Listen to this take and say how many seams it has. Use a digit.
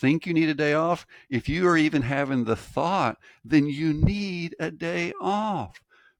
0